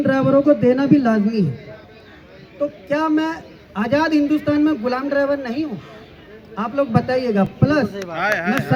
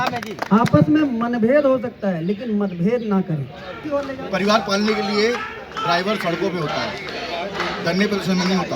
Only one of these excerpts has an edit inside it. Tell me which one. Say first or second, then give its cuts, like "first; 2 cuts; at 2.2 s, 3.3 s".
second; 1 cut; at 4.1 s